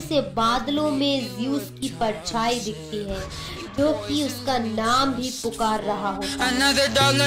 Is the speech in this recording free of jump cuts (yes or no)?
no